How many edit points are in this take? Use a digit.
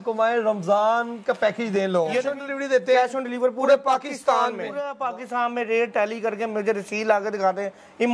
2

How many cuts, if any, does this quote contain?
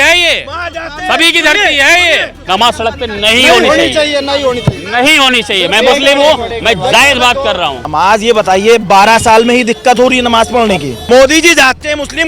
3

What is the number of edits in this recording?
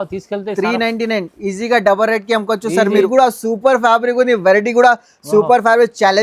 1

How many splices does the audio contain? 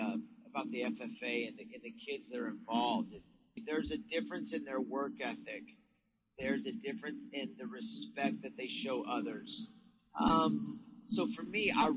1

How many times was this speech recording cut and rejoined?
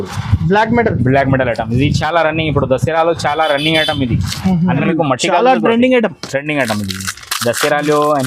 1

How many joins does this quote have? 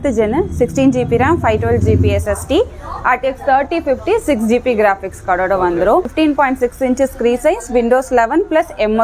1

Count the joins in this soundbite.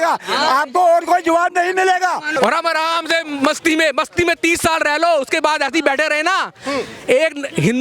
1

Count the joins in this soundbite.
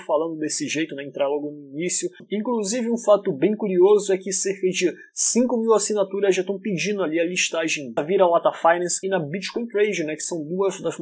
2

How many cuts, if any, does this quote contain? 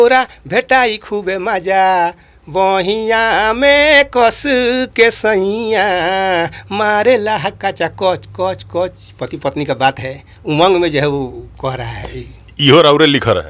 1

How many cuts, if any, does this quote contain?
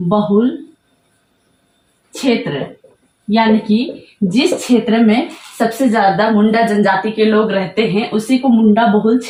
0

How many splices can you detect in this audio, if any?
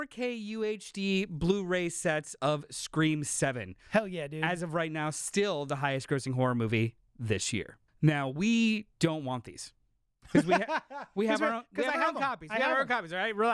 1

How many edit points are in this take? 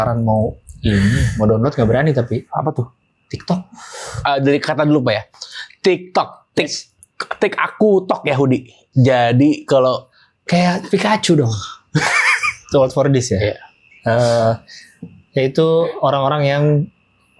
2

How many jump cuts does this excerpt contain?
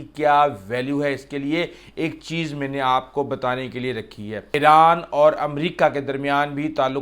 1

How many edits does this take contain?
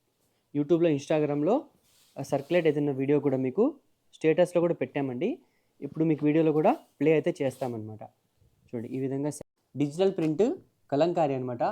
1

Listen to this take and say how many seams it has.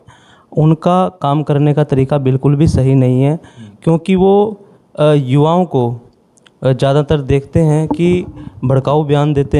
0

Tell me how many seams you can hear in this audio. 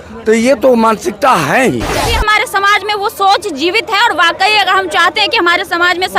1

